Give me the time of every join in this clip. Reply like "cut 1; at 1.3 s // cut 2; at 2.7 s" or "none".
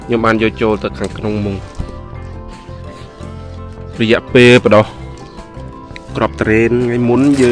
none